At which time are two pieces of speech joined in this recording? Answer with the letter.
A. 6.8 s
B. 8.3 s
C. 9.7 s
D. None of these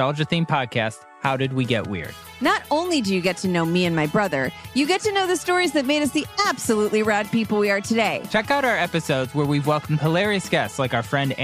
B